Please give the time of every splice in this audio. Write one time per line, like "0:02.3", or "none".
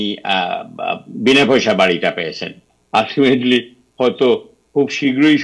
0:02.7

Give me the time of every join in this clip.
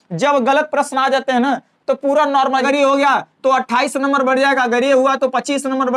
0:02.6

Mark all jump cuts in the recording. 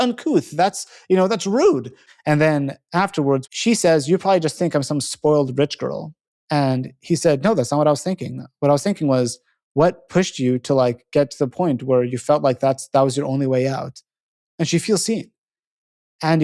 0:02.0
0:03.4

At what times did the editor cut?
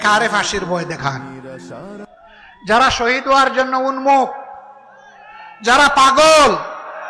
none

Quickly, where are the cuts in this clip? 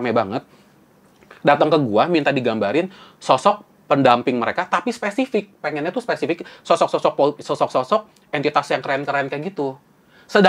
none

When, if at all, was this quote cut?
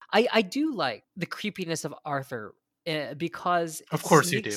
0:01.1

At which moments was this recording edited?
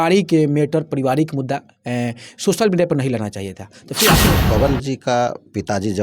0:04.3

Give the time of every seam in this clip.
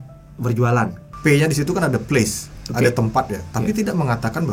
0:01.1

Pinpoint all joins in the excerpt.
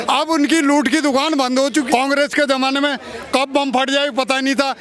0:01.9

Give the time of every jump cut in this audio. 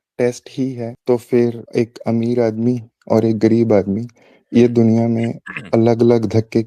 0:00.9
0:01.6

